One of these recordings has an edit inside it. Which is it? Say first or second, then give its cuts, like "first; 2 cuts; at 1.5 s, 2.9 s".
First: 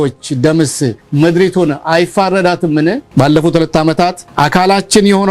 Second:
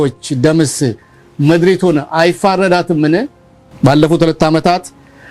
first; 3 cuts; at 1.0 s, 3.0 s, 4.2 s